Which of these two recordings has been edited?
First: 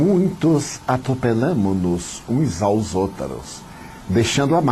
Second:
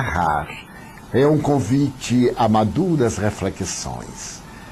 first; 1 cut; at 1.5 s

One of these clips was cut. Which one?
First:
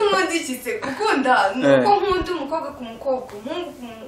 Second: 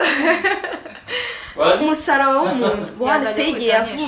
second; 1 cut; at 1.8 s

